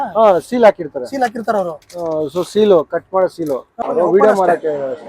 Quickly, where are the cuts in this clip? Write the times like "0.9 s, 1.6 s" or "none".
3.7 s